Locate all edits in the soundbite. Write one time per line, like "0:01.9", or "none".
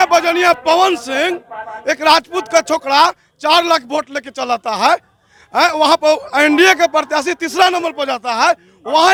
none